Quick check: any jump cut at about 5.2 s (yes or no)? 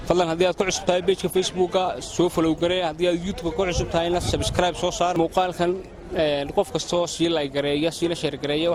no